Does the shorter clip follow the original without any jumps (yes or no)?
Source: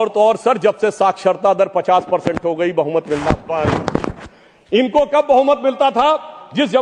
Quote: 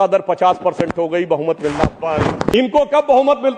no